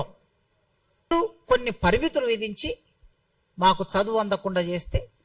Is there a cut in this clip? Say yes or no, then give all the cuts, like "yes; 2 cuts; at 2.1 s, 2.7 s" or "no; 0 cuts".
yes; 1 cut; at 1.1 s